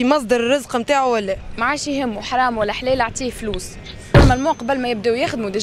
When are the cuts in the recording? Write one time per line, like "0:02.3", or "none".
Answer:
0:04.1